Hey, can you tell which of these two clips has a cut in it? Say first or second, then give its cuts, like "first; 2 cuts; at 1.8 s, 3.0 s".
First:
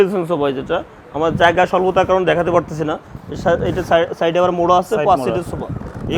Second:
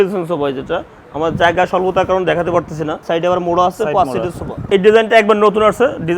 second; 2 cuts; at 3.0 s, 4.7 s